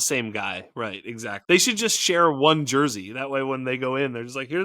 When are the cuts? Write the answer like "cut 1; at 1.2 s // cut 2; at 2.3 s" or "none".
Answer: cut 1; at 1.2 s